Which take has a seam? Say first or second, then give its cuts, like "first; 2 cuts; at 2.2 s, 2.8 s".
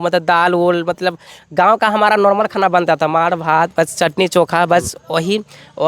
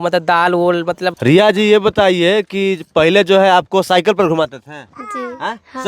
second; 1 cut; at 1.1 s